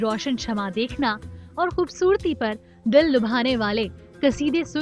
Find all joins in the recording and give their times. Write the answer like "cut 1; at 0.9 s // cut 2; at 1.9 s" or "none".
none